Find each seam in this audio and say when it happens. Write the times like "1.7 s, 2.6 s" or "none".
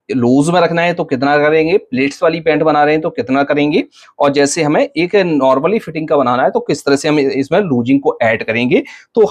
none